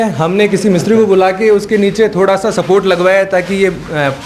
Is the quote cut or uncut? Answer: uncut